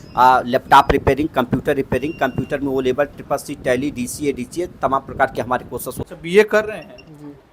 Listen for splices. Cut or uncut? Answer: cut